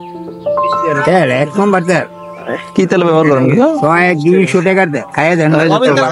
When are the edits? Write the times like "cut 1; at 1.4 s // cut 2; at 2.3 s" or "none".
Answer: cut 1; at 0.9 s